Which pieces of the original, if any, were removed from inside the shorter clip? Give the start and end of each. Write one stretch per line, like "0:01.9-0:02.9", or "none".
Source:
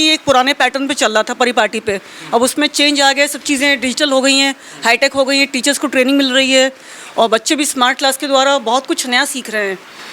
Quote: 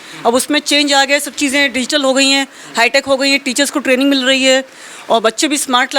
none